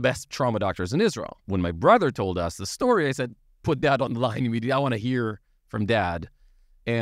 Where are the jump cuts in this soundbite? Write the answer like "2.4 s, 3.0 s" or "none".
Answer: 1.3 s

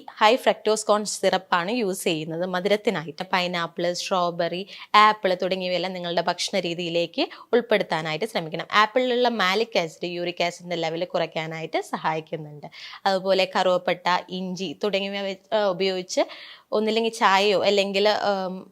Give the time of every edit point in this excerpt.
3.2 s

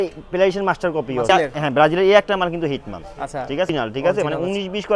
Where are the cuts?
1.3 s, 3.7 s

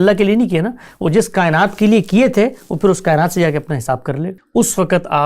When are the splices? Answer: 4.3 s

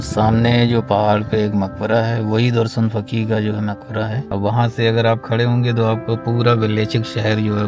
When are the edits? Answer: 4.2 s

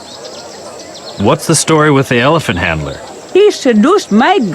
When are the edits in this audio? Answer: 1.1 s

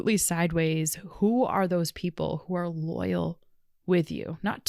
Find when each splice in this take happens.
none

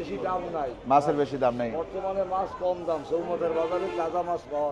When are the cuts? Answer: none

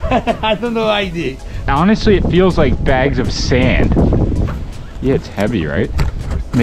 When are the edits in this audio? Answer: 1.6 s, 4.6 s

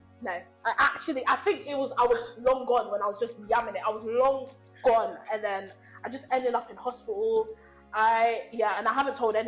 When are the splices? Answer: none

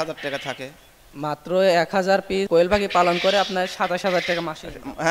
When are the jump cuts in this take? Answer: 2.5 s

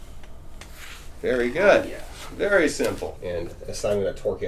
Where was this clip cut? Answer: 3.1 s

